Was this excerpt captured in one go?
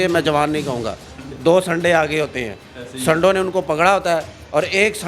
yes; 0 cuts

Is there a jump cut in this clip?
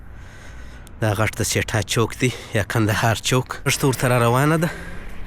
yes; 1 cut; at 3.7 s

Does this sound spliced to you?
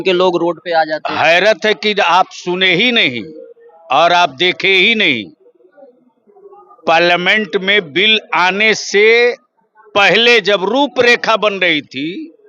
no; 0 cuts

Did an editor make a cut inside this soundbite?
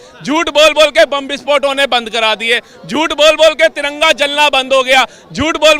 no; 0 cuts

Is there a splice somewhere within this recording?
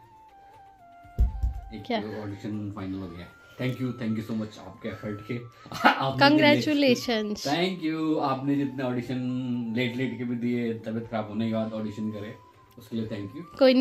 no; 0 cuts

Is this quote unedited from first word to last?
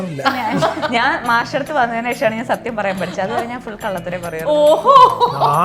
yes; 0 cuts

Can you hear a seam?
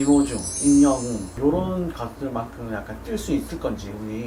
no; 0 cuts

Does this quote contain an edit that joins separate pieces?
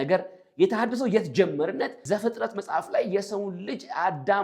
yes; 1 cut; at 2.0 s

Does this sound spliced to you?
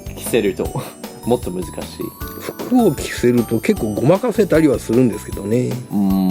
no; 0 cuts

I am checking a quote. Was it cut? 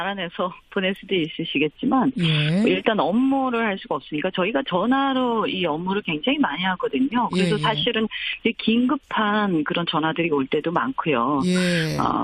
yes; 1 cut; at 10.5 s

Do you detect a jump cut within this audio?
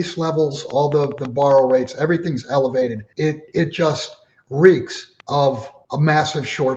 yes; 2 cuts; at 3.0 s, 5.4 s

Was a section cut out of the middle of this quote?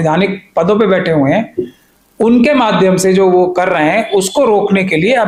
no; 0 cuts

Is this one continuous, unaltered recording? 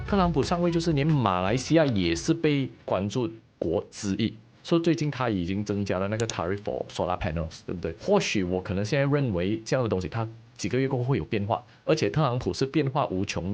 no; 2 cuts; at 4.5 s, 8.0 s

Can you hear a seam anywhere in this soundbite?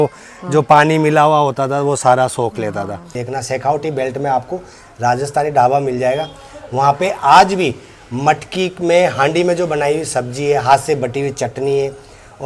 yes; 1 cut; at 3.2 s

